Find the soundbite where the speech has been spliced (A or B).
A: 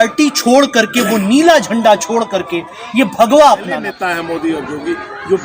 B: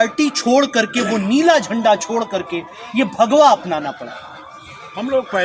A